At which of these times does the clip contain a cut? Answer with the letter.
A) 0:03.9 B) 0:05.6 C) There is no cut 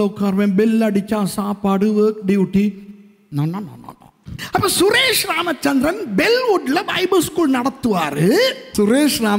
C